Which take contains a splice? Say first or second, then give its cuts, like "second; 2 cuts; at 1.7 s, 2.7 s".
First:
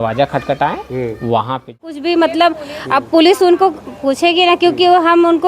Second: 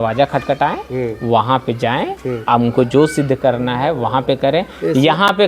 first; 1 cut; at 1.9 s